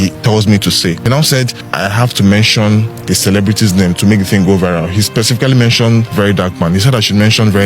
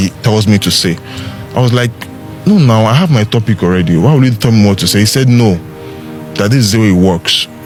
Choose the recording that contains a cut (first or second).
first